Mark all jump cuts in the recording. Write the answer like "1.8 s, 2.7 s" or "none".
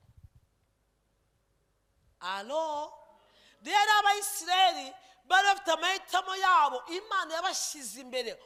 none